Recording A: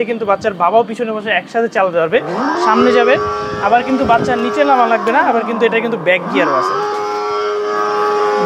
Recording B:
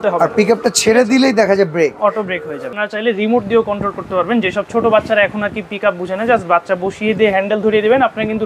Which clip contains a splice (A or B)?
B